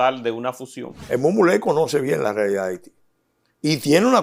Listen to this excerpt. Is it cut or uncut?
cut